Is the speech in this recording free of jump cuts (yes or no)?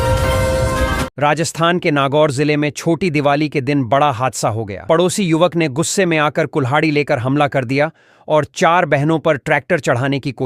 no